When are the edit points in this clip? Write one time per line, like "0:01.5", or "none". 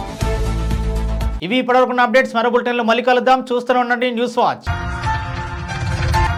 none